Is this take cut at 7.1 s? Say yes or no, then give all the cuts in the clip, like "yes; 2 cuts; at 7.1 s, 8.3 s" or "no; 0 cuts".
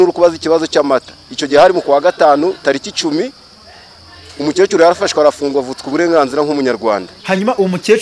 yes; 1 cut; at 7.1 s